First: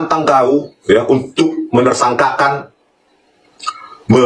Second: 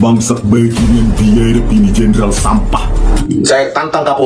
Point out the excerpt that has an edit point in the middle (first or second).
second